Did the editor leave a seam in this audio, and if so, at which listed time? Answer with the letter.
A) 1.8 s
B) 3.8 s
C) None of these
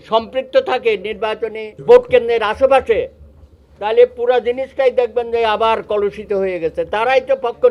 A